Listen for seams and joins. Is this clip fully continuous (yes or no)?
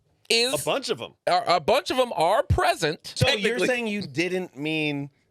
no